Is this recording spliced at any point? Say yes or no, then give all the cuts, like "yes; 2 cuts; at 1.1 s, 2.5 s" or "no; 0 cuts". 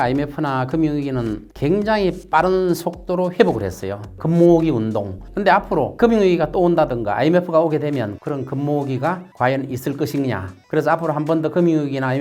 yes; 4 cuts; at 4.2 s, 5.4 s, 8.2 s, 10.5 s